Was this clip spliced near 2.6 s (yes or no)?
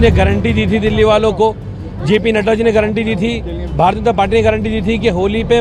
no